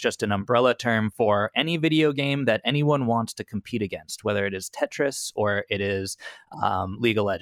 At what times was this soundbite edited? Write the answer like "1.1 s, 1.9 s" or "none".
none